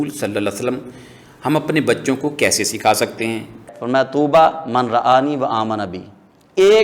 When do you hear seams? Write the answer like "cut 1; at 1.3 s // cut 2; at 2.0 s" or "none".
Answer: cut 1; at 3.6 s